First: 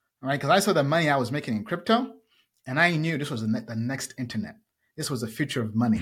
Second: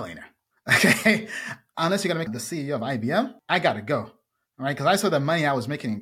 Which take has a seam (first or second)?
second